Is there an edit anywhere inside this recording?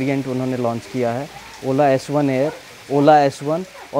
no; 0 cuts

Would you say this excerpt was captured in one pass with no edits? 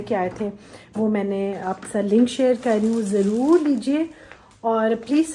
yes; 0 cuts

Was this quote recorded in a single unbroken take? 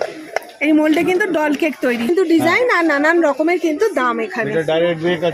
no; 1 cut; at 2.1 s

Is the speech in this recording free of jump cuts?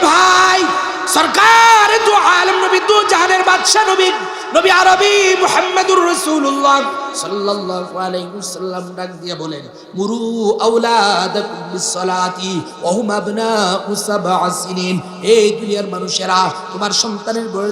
no; 1 cut; at 1.0 s

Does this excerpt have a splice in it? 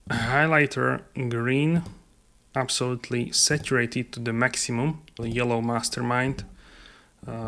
yes; 1 cut; at 5.1 s

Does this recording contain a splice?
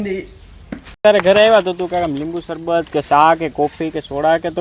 yes; 1 cut; at 1.0 s

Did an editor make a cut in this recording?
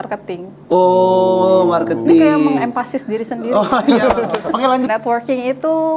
yes; 1 cut; at 4.9 s

